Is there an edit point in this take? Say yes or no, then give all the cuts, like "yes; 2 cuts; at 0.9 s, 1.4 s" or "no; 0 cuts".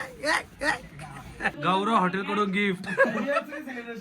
yes; 1 cut; at 1.5 s